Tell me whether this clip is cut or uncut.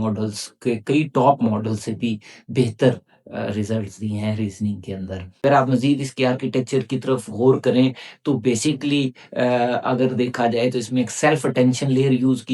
cut